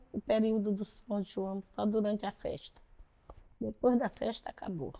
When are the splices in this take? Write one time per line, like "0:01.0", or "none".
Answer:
none